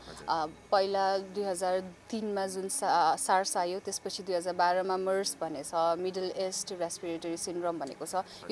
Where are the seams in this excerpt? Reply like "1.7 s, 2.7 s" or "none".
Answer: none